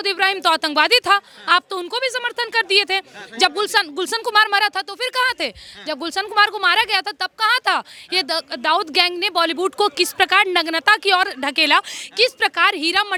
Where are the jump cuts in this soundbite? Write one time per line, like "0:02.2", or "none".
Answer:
none